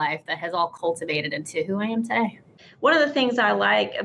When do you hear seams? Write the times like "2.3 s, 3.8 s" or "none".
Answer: 2.6 s